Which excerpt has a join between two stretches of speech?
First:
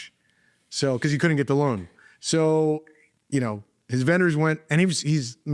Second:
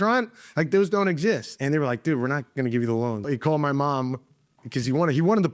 second; 2 cuts; at 1.5 s, 3.3 s

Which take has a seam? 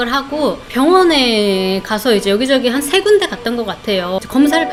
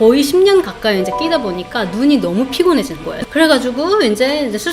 second; 1 cut; at 3.1 s

